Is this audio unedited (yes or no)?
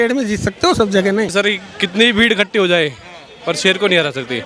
no